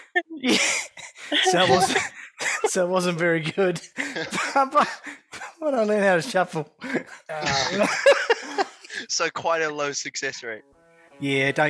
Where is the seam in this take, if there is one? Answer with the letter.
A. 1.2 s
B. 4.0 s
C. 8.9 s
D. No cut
D